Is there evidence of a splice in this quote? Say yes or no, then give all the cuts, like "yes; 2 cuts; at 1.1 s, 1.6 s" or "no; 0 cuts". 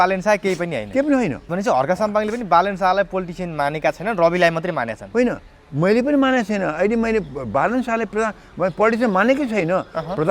yes; 1 cut; at 1.5 s